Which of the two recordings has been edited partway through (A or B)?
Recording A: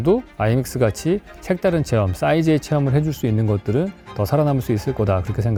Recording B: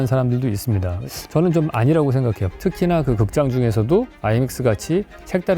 B